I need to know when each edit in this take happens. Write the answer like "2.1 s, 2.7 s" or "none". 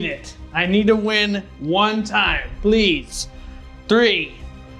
none

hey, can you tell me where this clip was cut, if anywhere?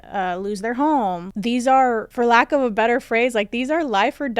1.2 s, 2.1 s

